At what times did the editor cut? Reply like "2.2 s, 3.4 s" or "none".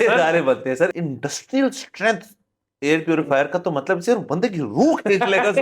1.0 s